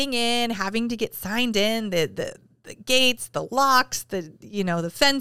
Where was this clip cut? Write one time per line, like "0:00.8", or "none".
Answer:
none